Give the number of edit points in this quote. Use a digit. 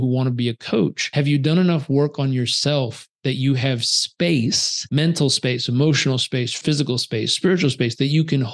3